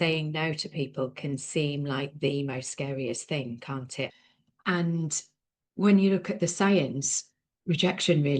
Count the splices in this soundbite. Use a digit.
1